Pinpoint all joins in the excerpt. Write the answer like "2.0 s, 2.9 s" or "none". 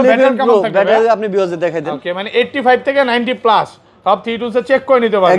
none